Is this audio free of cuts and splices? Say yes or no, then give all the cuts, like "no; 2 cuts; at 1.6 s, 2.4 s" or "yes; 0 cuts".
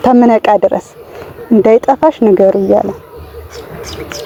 yes; 0 cuts